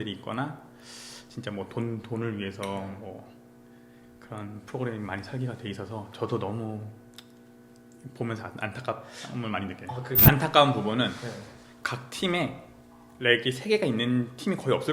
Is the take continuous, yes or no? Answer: no